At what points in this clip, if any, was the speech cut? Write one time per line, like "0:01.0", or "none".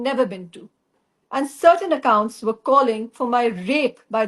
0:01.0